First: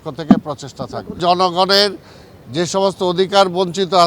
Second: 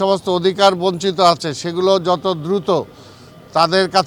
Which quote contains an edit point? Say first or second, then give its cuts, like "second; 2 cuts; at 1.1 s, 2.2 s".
first; 1 cut; at 1.2 s